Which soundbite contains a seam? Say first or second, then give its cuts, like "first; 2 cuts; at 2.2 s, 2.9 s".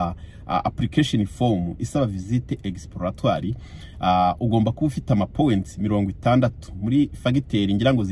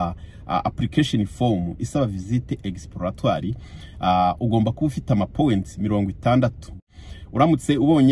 second; 1 cut; at 6.7 s